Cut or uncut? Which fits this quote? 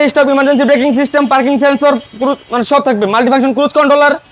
uncut